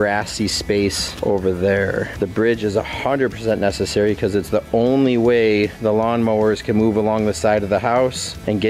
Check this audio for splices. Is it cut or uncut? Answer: uncut